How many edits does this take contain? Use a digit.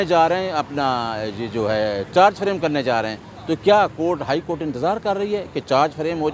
0